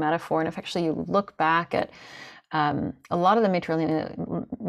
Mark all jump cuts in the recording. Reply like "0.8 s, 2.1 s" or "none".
none